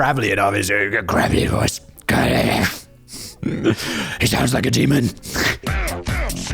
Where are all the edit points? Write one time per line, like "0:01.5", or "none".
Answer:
0:05.6